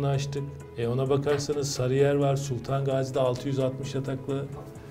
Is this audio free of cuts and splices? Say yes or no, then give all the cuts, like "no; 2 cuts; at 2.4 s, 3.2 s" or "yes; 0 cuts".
yes; 0 cuts